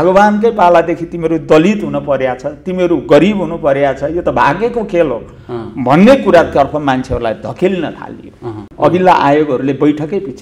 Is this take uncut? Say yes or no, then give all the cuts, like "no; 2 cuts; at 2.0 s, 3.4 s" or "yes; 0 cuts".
no; 1 cut; at 8.7 s